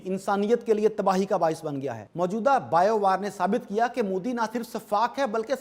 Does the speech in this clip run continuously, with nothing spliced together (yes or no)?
no